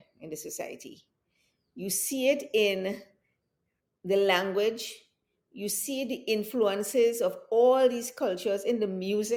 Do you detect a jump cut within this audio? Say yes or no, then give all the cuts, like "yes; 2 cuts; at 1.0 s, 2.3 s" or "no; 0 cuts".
no; 0 cuts